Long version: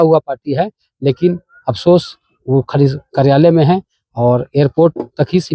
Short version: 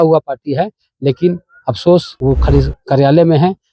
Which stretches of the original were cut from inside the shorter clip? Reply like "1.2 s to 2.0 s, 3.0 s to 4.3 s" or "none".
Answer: 2.1 s to 2.4 s